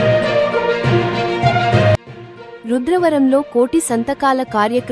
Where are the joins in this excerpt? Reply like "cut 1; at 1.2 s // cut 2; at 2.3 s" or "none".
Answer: cut 1; at 2.2 s